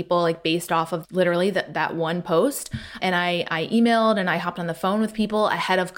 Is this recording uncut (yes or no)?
no